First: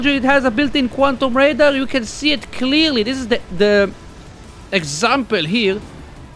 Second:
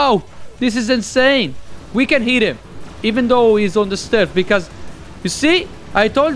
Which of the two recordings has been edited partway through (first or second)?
second